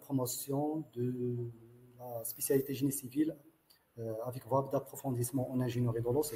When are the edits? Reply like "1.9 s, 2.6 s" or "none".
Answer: none